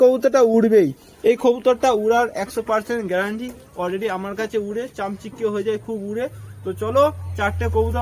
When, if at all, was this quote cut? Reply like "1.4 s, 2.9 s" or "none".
none